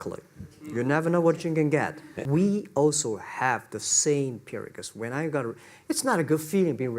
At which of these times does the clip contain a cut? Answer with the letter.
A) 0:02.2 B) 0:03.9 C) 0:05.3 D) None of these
A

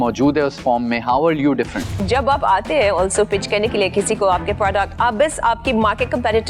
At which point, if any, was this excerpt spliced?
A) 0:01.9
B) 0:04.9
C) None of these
A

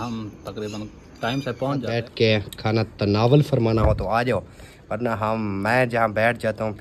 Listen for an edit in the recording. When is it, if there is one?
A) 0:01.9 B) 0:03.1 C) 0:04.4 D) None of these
A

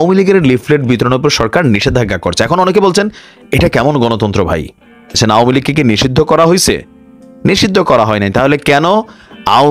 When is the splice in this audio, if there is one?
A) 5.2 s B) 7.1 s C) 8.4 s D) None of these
A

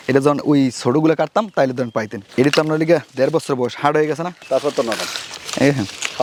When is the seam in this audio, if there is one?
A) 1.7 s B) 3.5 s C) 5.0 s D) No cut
D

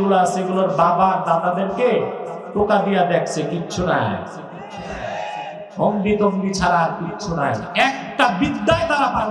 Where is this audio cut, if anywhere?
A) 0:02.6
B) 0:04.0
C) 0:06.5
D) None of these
D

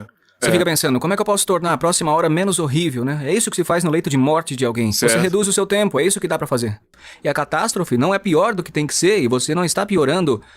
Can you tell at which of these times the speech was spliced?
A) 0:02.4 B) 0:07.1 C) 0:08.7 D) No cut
B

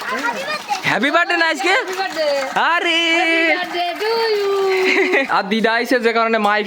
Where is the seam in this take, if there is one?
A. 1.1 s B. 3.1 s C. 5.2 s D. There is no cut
C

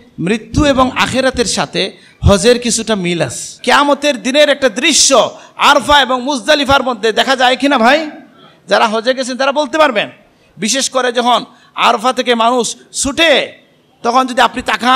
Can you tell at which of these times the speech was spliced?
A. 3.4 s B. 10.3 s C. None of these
A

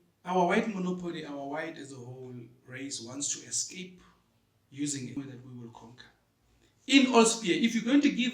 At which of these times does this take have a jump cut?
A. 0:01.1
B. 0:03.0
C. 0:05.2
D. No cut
C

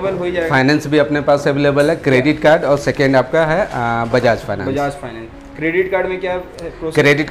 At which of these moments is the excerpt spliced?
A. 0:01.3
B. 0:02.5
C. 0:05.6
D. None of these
D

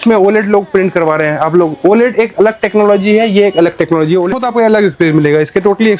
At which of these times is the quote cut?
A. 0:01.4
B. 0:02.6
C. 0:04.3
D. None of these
C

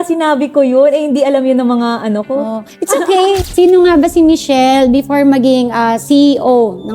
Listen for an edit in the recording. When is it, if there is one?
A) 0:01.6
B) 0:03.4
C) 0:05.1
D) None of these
B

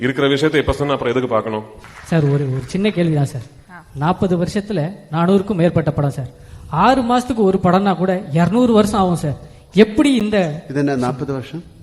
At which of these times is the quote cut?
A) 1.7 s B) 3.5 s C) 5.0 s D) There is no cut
A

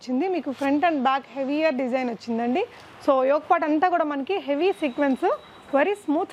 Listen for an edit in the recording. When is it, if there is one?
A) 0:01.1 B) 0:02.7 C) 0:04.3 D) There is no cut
D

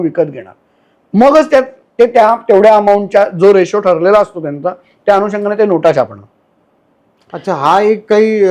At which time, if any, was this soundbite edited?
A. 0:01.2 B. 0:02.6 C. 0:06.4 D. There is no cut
D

